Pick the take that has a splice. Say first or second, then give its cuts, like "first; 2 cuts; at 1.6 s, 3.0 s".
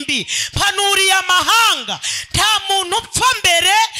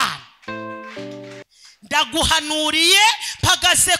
second; 1 cut; at 1.4 s